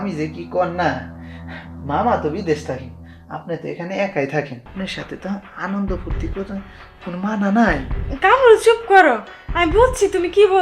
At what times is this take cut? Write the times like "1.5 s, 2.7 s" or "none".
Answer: 4.6 s